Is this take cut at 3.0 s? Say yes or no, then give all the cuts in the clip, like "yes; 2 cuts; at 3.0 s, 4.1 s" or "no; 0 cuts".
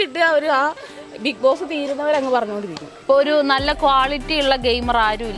no; 0 cuts